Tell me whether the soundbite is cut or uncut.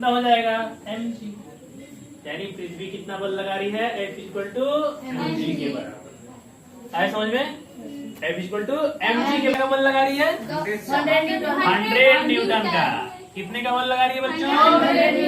cut